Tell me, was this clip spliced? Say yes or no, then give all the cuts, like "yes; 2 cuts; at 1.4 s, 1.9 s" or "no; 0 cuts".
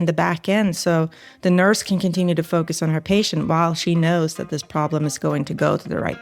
no; 0 cuts